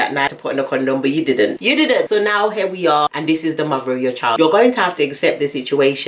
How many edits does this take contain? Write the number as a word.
one